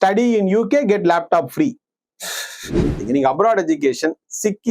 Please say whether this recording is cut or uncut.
cut